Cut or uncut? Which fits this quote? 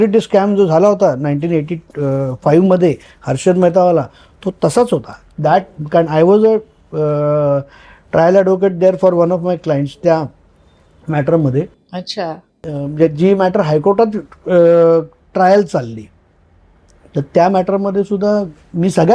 uncut